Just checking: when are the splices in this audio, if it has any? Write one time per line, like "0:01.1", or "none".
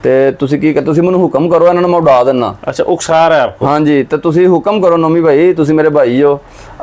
none